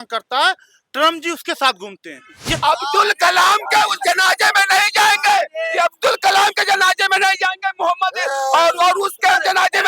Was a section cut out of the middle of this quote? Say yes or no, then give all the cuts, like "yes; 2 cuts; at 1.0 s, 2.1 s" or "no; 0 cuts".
yes; 1 cut; at 2.6 s